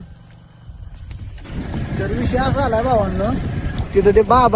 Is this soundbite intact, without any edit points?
no; 1 cut; at 1.4 s

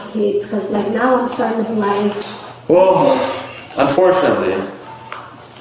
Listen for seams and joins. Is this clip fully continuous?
yes; 0 cuts

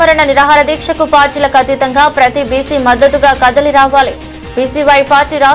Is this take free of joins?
yes; 0 cuts

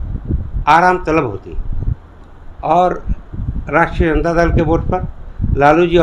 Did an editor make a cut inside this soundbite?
no; 0 cuts

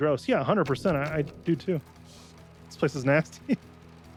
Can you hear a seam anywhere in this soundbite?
no; 0 cuts

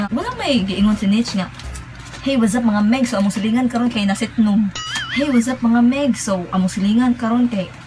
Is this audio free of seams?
yes; 0 cuts

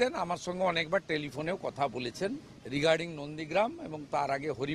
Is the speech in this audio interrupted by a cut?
yes; 1 cut; at 2.5 s

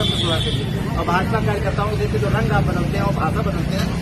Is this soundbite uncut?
yes; 0 cuts

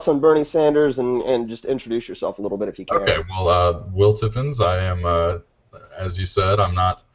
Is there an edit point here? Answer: yes; 1 cut; at 1.5 s

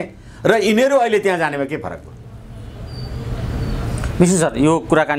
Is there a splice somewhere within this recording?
no; 0 cuts

